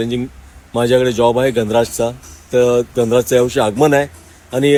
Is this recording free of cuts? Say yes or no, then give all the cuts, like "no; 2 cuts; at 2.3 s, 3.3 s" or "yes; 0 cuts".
yes; 0 cuts